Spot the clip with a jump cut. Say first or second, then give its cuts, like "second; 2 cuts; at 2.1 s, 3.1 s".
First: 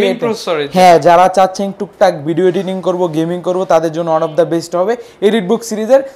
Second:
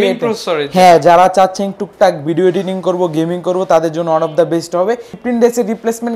second; 1 cut; at 5.2 s